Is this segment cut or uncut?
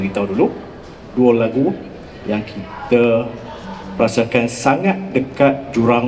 uncut